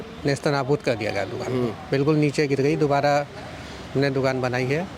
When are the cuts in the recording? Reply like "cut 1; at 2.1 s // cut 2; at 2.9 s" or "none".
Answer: none